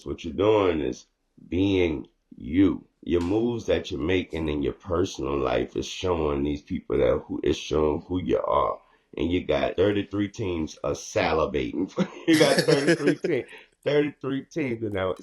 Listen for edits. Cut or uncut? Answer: cut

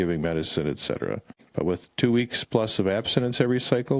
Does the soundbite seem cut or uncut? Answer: cut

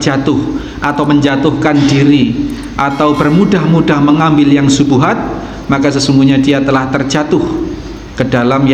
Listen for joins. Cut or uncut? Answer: uncut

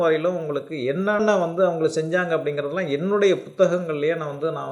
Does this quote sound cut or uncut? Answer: cut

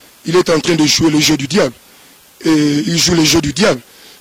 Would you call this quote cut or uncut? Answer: uncut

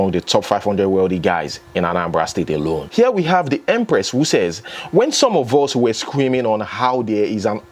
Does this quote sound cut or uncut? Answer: cut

